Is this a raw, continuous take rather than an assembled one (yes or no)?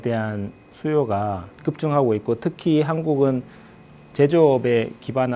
no